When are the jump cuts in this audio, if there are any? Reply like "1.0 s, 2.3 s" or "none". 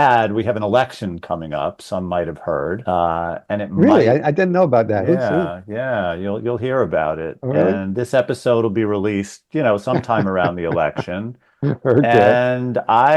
2.8 s